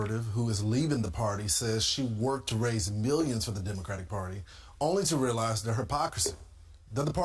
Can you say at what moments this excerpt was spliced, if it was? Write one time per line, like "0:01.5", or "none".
none